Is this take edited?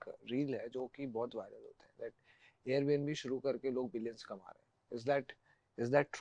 no; 0 cuts

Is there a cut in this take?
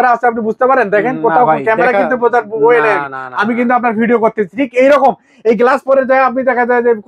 no; 0 cuts

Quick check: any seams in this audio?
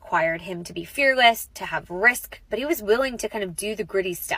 yes; 1 cut; at 2.4 s

